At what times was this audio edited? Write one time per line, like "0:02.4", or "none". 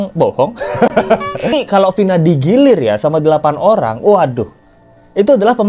0:01.5